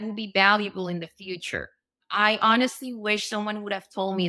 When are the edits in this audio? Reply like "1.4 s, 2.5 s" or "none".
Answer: none